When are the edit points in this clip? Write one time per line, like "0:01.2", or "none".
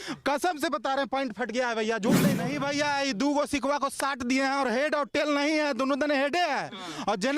0:02.4